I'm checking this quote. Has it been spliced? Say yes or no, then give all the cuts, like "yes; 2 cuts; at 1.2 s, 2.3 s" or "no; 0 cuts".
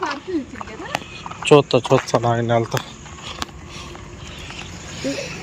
no; 0 cuts